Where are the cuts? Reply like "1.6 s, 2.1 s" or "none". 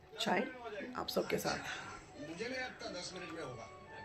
none